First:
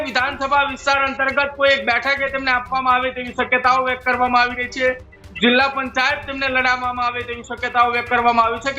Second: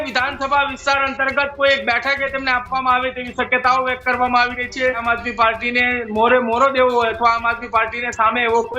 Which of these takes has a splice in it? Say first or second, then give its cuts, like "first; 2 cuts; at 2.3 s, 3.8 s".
second; 1 cut; at 5.0 s